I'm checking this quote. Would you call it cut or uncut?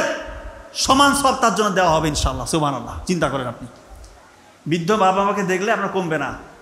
uncut